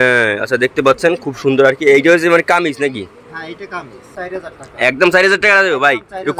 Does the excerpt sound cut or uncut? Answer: cut